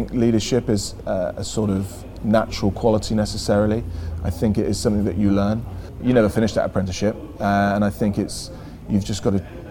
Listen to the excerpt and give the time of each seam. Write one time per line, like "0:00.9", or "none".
0:00.9
0:06.0